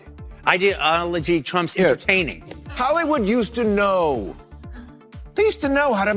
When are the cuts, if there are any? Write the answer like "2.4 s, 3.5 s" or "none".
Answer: 2.3 s